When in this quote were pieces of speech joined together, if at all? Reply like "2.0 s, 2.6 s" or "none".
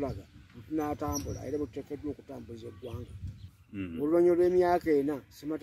3.3 s